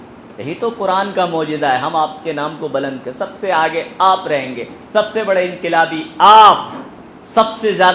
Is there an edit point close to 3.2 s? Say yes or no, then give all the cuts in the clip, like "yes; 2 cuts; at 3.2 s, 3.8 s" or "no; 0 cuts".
no; 0 cuts